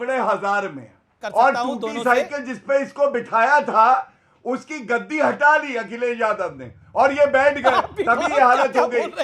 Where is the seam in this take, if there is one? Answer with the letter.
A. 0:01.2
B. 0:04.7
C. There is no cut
A